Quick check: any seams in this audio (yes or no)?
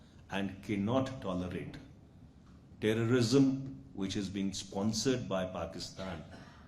no